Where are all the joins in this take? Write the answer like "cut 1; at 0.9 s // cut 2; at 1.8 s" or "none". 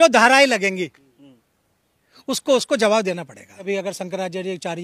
cut 1; at 3.6 s